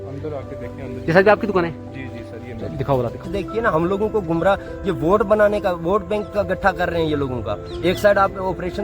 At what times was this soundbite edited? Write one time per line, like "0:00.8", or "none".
0:03.2